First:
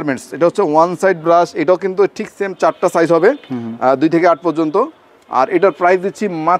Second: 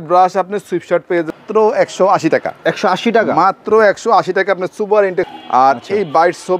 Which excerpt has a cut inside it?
second; 2 cuts; at 1.4 s, 5.3 s

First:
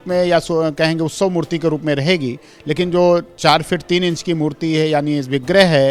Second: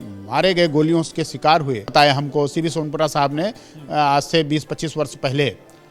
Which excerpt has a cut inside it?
second; 1 cut; at 1.9 s

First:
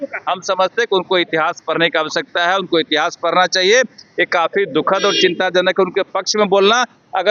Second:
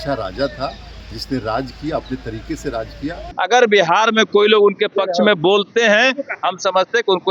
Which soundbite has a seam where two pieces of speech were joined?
second; 1 cut; at 3.2 s

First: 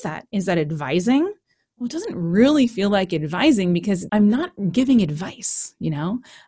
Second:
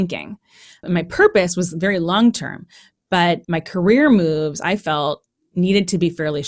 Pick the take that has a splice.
first; 1 cut; at 4.0 s

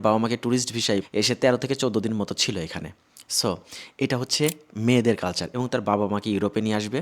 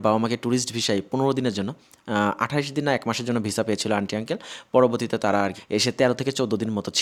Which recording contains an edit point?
first; 2 cuts; at 1.1 s, 5.5 s

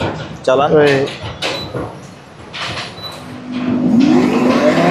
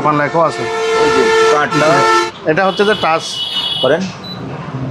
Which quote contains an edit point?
second; 1 cut; at 2.2 s

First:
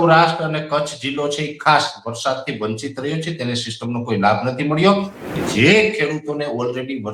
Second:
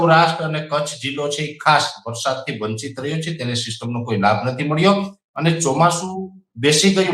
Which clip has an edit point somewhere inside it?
first; 1 cut; at 5.3 s

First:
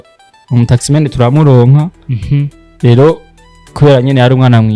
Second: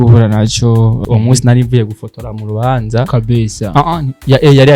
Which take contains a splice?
second; 1 cut; at 1.0 s

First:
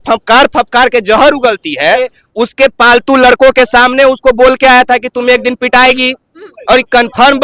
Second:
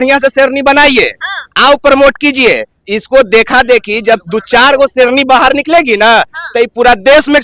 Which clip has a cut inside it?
first; 1 cut; at 2.1 s

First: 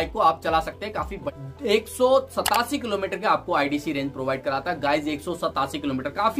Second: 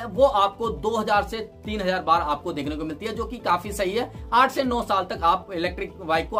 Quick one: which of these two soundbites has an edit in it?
first; 1 cut; at 1.2 s

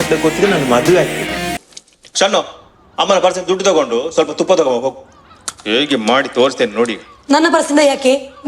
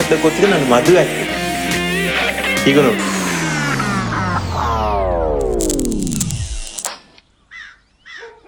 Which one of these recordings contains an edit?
first; 1 cut; at 1.6 s

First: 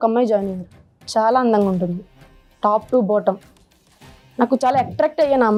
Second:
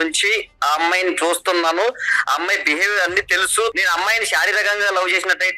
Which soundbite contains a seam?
second; 1 cut; at 3.7 s

